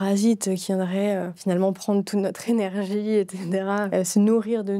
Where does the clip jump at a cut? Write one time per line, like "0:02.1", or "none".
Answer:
0:01.3
0:03.9

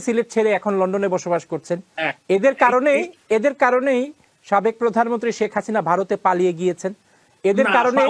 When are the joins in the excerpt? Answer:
none

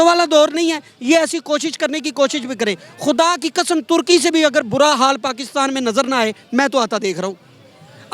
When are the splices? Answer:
none

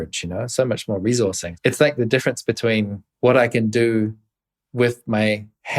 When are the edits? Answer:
0:03.0

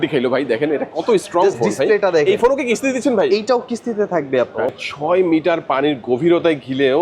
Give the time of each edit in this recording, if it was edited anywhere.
0:04.7

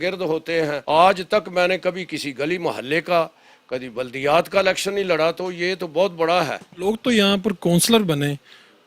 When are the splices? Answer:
0:00.8
0:06.7

